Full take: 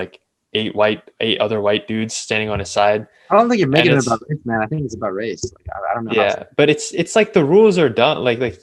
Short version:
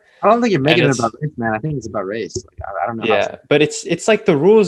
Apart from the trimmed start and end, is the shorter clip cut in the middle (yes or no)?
no